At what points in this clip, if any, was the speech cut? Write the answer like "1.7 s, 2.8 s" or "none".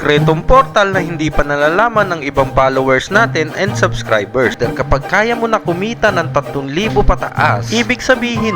4.6 s